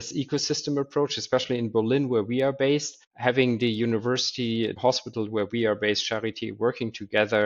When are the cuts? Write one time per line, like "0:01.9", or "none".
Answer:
none